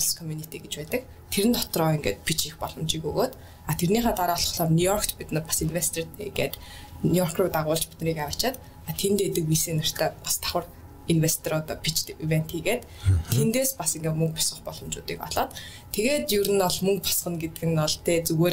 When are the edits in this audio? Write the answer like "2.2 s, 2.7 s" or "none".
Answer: none

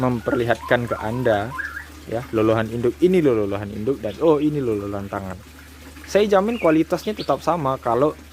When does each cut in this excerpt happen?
none

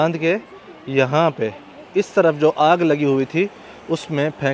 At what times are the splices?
none

